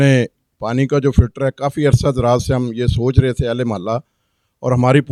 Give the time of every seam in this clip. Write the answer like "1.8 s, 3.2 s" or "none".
none